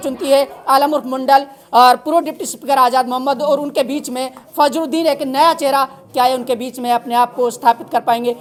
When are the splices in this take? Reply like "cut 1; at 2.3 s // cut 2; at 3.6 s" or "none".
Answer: none